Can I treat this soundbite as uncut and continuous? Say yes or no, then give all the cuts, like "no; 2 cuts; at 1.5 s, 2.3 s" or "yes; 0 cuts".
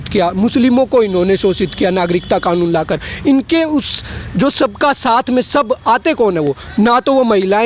yes; 0 cuts